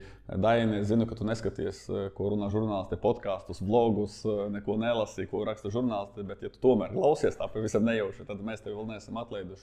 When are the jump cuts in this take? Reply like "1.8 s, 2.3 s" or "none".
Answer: none